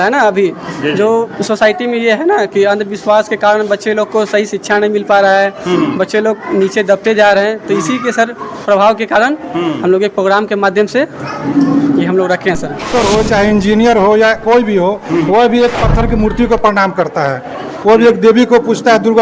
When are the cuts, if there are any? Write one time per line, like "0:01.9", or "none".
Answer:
0:12.9

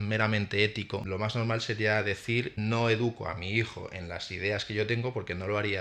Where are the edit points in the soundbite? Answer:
0:01.0
0:02.5

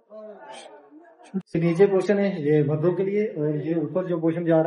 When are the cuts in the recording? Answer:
0:01.4

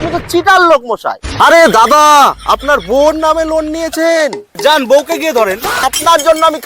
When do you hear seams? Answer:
0:01.2
0:05.8

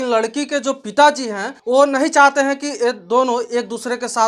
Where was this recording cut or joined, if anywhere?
0:01.5

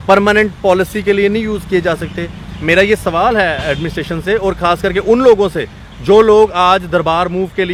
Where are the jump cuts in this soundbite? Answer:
none

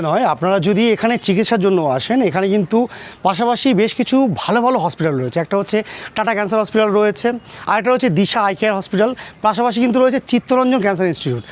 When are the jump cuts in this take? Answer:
none

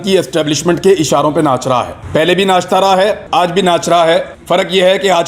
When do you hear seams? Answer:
0:02.0
0:03.2
0:04.3

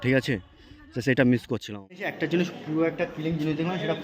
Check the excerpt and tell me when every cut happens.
0:01.8

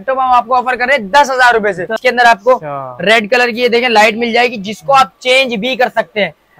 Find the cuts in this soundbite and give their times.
0:02.0

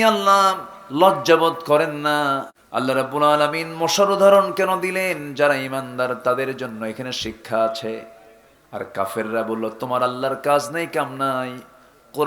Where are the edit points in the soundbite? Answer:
0:02.5

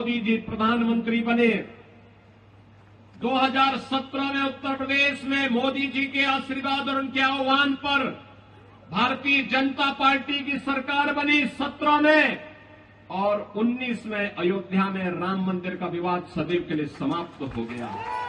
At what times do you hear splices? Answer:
none

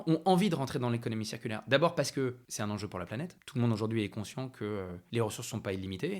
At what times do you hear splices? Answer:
0:02.4
0:03.4
0:05.0

